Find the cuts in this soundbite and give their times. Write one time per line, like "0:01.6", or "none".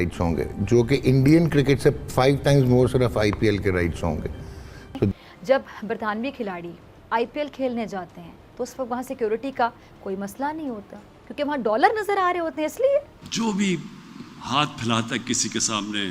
0:05.1
0:13.2